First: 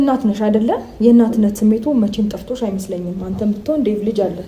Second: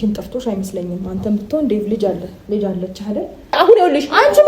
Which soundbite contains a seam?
second; 1 cut; at 3.6 s

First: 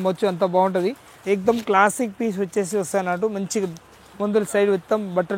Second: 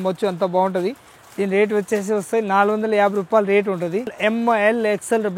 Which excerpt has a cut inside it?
first; 1 cut; at 1.1 s

